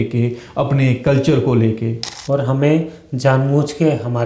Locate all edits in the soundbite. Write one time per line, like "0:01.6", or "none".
0:02.1